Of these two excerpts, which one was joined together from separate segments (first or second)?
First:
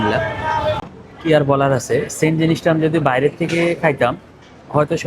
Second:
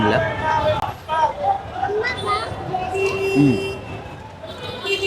first